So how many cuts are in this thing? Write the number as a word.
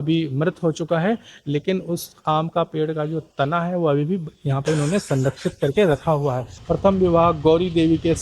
one